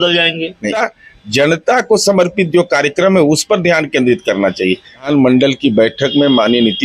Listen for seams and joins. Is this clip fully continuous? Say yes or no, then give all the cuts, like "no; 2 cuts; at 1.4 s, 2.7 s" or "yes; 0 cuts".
no; 2 cuts; at 0.8 s, 5.0 s